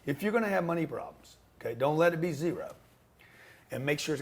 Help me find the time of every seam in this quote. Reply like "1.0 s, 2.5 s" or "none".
none